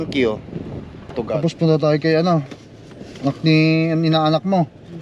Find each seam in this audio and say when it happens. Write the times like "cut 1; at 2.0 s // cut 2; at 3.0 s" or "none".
cut 1; at 1.3 s